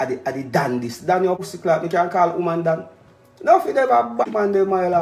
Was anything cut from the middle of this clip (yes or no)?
yes